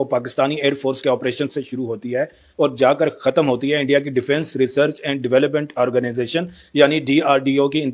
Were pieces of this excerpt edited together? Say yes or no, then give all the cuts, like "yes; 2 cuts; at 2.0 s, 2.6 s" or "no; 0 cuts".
no; 0 cuts